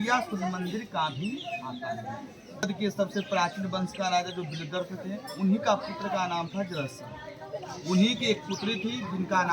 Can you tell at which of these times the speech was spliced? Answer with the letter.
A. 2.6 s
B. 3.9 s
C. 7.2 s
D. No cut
A